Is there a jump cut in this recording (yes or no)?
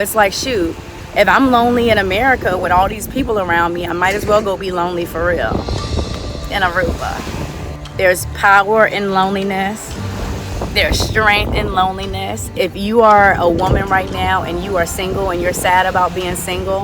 yes